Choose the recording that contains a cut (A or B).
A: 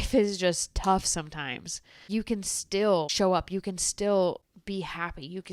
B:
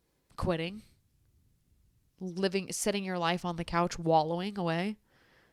A